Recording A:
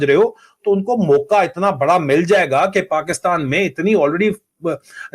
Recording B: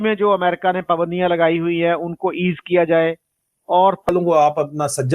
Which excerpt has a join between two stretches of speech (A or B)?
B